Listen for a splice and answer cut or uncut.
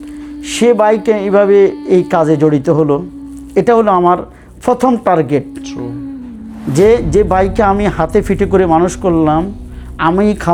uncut